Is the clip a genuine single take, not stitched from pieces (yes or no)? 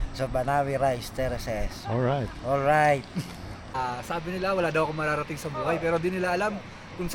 no